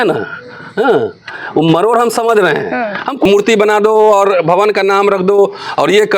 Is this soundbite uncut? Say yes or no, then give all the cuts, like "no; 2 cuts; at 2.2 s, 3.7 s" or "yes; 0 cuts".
no; 1 cut; at 3.3 s